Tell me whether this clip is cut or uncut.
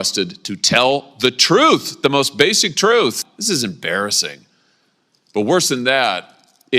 cut